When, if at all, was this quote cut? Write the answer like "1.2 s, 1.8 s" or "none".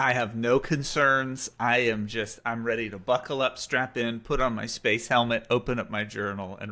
none